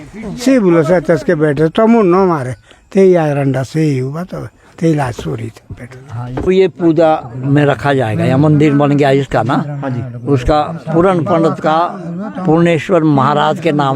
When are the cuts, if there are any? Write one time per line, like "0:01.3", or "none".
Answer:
0:06.5

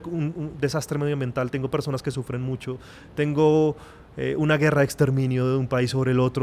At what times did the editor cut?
none

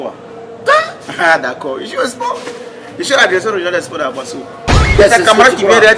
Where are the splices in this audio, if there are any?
0:04.8

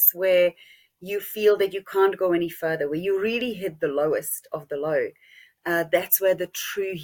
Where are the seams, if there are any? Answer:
none

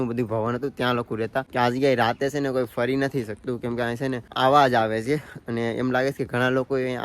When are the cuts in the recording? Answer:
0:01.4
0:04.3

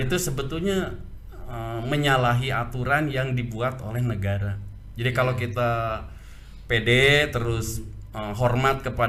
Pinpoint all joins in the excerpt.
none

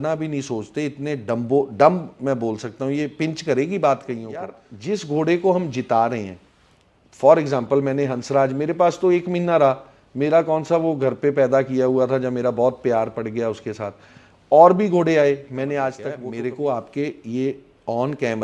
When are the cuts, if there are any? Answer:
0:04.7
0:16.1

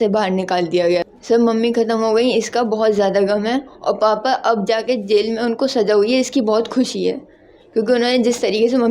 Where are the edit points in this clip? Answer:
0:01.1

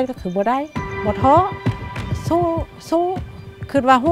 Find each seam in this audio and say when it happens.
0:00.9

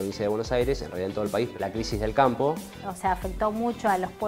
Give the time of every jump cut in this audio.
0:01.5
0:02.8

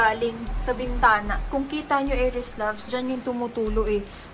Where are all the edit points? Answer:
0:01.4
0:02.9

